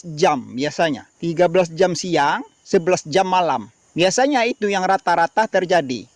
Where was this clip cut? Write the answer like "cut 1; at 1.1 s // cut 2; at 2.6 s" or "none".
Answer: cut 1; at 1.1 s // cut 2; at 2.5 s // cut 3; at 3.8 s